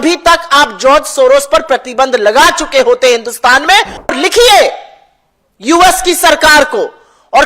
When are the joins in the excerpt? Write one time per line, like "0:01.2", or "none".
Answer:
0:04.1